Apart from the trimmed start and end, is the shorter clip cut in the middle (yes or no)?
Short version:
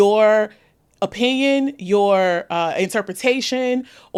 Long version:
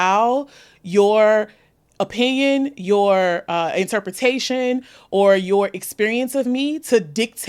no